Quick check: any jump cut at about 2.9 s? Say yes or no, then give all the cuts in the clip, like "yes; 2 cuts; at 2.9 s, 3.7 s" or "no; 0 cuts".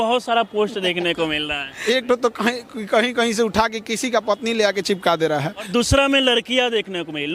no; 2 cuts; at 1.7 s, 5.7 s